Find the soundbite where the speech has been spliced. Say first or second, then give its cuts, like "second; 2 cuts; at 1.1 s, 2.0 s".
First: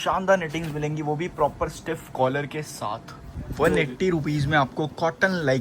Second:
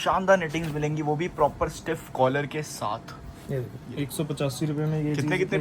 first; 1 cut; at 3.3 s